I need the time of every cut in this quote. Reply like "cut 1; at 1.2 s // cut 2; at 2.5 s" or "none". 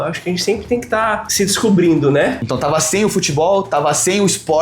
cut 1; at 1.3 s // cut 2; at 2.4 s